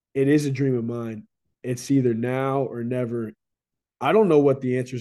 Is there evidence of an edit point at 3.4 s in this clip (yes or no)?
yes